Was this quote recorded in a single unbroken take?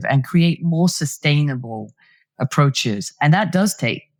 yes; 0 cuts

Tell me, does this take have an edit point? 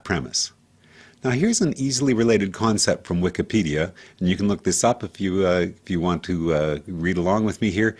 no; 0 cuts

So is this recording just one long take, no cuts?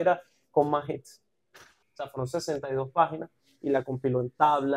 no; 1 cut; at 1.8 s

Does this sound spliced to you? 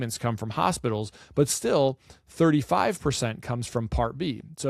no; 0 cuts

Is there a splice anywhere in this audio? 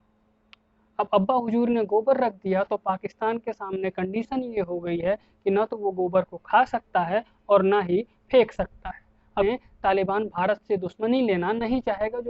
yes; 1 cut; at 9.4 s

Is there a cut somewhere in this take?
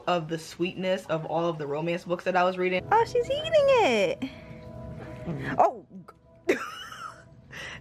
yes; 1 cut; at 2.8 s

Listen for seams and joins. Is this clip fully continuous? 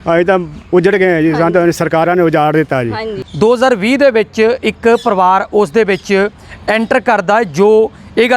yes; 0 cuts

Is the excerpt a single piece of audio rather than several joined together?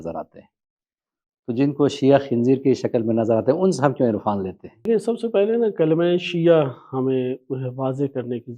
no; 1 cut; at 4.9 s

